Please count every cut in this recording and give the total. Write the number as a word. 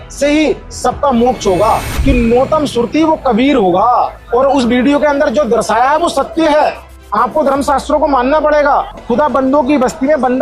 two